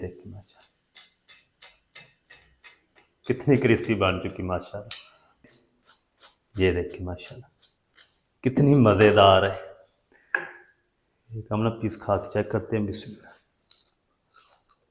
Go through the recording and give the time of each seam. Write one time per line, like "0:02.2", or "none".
0:05.4